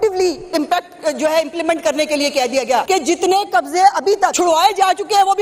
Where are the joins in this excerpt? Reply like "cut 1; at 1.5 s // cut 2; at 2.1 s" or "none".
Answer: cut 1; at 2.9 s // cut 2; at 4.3 s